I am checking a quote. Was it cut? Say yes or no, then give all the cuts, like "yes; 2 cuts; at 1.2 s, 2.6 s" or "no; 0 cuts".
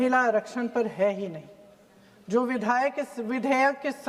no; 0 cuts